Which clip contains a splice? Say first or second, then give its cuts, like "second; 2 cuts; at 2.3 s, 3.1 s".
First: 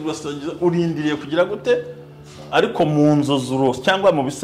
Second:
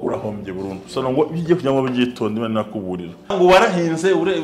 second; 1 cut; at 3.3 s